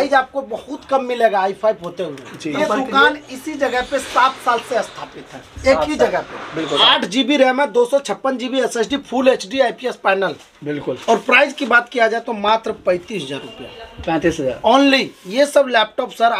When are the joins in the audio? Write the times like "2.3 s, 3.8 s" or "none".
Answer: 2.5 s, 6.8 s